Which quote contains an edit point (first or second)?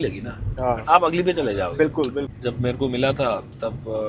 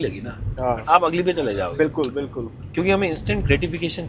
first